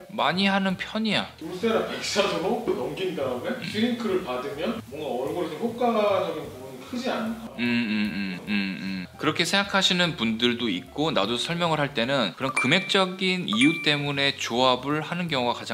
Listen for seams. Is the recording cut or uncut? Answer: cut